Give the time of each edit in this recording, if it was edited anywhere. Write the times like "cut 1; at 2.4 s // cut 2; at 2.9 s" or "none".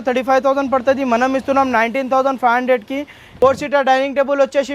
cut 1; at 3.3 s

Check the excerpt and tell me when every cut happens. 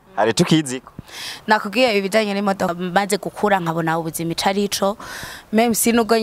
cut 1; at 2.7 s

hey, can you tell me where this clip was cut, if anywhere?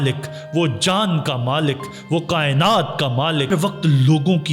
cut 1; at 3.5 s

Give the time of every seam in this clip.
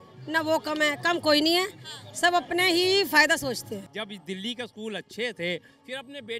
cut 1; at 3.9 s

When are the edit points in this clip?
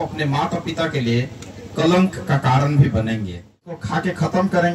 cut 1; at 3.8 s

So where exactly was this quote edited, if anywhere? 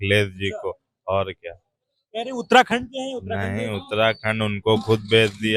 none

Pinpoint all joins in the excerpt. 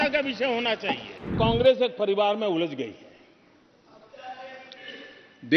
cut 1; at 1.2 s

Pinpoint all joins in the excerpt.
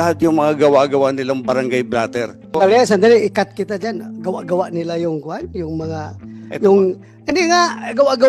cut 1; at 2.5 s

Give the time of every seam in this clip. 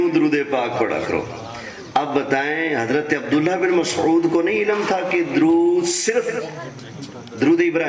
none

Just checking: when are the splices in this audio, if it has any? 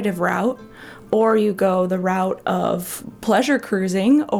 cut 1; at 3.0 s

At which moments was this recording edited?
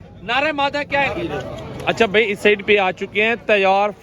cut 1; at 1.2 s

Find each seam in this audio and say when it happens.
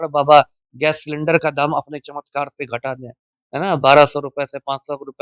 none

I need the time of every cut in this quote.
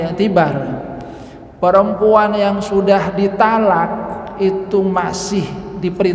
none

